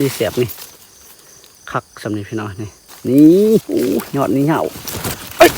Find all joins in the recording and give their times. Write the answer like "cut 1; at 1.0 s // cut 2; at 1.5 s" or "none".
cut 1; at 2.8 s // cut 2; at 3.7 s